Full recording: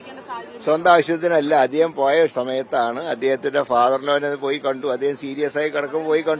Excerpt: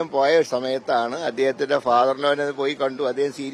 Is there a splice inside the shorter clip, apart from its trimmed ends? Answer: no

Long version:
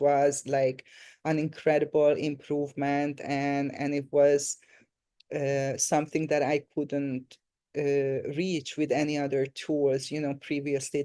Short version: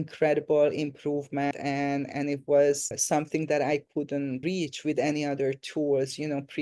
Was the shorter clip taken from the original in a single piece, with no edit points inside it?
no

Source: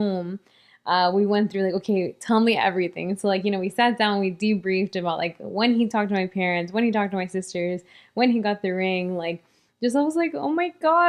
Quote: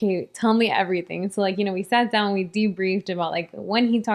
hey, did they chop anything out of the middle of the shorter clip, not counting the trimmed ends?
no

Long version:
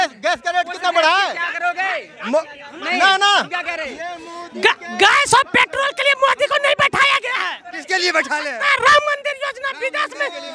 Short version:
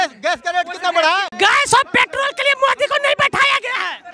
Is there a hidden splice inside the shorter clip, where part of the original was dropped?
yes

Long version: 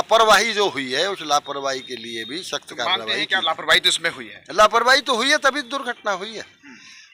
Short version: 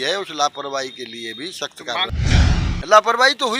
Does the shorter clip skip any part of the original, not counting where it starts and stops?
yes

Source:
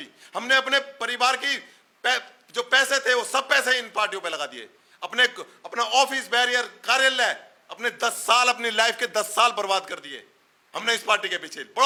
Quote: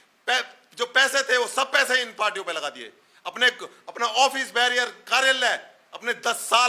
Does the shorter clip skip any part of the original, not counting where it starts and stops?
no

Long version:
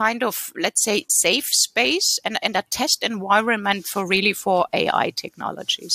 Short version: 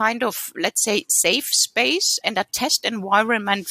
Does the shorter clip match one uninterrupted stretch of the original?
no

